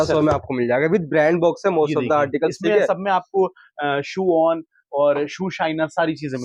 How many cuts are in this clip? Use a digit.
0